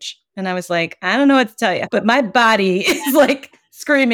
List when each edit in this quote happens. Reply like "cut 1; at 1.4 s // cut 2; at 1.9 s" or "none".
cut 1; at 1.8 s